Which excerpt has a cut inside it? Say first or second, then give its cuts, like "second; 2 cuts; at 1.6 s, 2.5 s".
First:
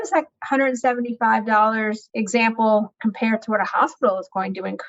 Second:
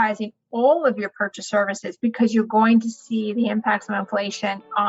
first; 2 cuts; at 2.0 s, 2.9 s